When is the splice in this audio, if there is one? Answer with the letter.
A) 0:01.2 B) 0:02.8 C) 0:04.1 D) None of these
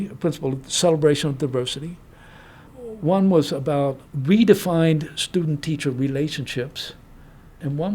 D